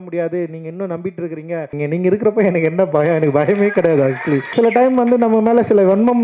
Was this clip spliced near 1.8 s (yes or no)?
yes